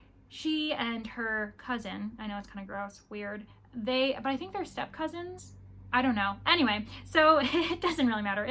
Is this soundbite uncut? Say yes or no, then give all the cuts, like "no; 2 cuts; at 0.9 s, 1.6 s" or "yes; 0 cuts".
yes; 0 cuts